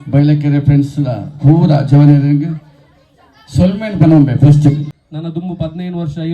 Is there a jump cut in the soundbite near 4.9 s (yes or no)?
yes